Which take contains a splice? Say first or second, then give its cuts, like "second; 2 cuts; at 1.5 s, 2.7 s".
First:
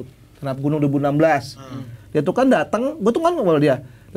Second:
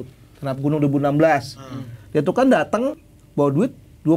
second; 1 cut; at 3.0 s